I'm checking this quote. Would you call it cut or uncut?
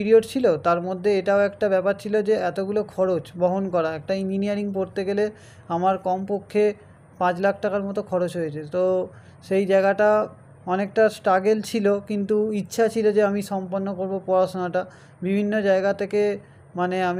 uncut